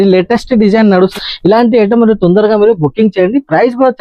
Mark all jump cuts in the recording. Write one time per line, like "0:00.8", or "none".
0:01.1